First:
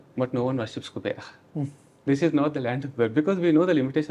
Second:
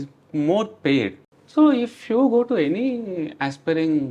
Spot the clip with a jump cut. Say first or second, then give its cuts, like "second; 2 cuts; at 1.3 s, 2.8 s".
second; 1 cut; at 1.3 s